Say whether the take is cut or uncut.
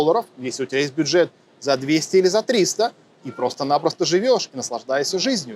uncut